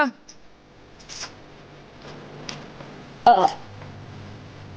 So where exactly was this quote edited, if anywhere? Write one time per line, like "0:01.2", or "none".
none